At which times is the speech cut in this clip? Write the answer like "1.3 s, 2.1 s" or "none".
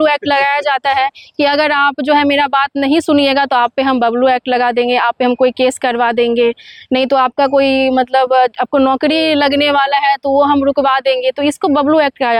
none